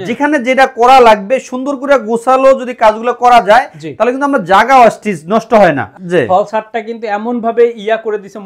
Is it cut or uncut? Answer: cut